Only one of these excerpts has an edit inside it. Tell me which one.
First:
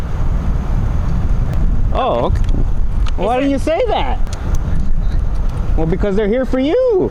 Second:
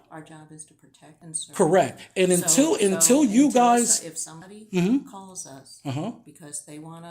second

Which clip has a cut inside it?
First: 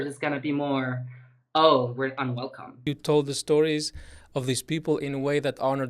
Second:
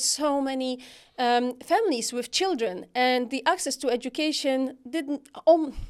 first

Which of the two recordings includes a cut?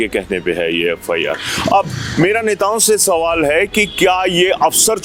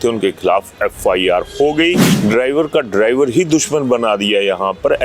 second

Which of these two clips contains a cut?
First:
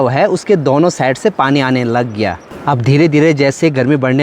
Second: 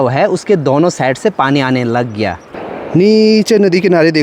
second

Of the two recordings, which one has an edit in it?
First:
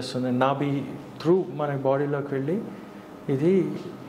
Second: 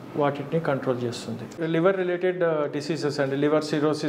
second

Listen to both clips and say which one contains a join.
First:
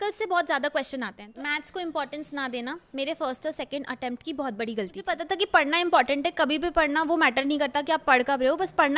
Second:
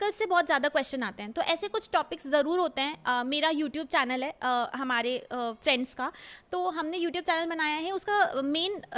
first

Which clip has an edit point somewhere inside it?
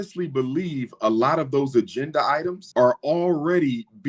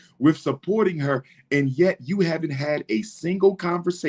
first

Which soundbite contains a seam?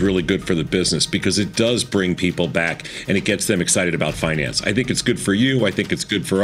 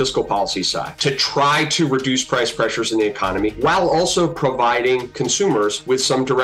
second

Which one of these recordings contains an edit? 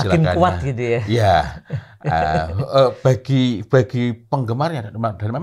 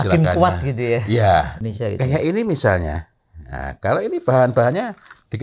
second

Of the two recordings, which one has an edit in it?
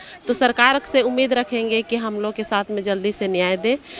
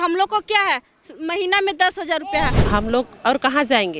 second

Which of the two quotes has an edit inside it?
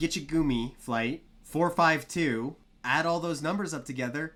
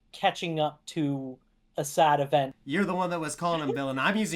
second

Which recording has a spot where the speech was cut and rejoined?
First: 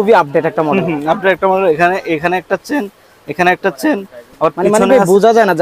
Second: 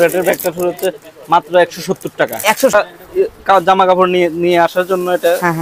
second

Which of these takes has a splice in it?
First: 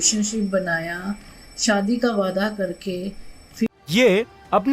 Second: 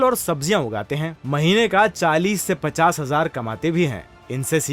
first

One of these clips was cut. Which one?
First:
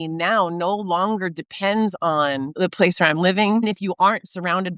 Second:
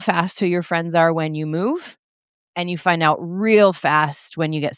first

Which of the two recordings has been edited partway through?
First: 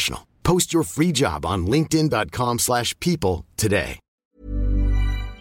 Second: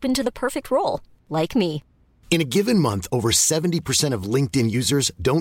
first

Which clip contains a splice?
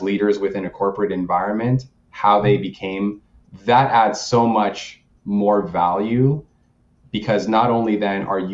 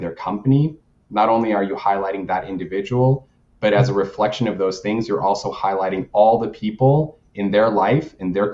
first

